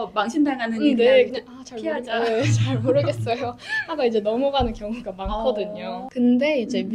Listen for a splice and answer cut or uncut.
cut